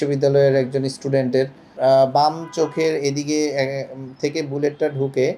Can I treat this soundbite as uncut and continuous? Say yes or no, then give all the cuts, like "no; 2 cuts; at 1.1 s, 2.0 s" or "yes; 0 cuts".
no; 1 cut; at 1.7 s